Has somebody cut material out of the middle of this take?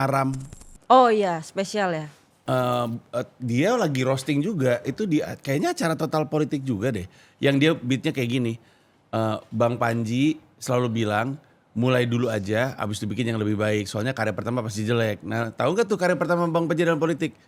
no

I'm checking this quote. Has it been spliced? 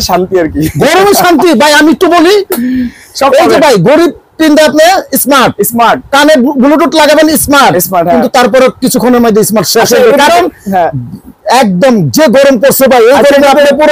no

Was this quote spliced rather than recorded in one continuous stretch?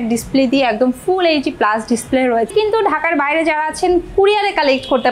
yes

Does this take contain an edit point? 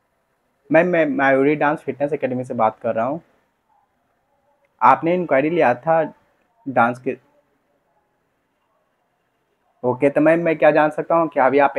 no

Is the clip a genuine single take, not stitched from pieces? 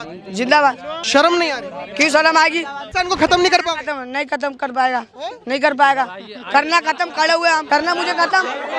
no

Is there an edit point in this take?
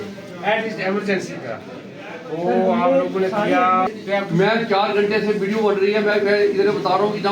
yes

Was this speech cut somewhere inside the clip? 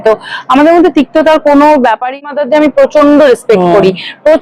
yes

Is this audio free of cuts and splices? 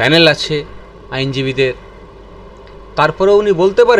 yes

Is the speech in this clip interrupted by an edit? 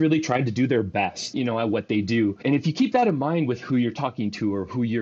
yes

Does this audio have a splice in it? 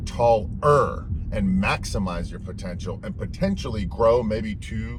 no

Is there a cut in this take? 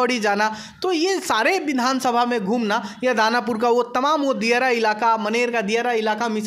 no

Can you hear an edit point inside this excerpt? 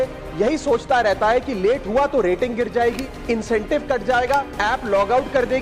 yes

